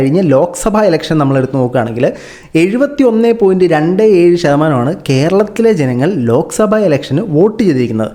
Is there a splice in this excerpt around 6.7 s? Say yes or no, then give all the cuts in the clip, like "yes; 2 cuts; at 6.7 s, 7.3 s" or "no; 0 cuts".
no; 0 cuts